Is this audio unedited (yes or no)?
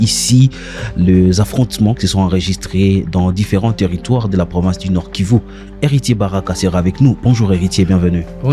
yes